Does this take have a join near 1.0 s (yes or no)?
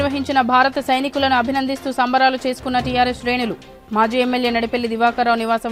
no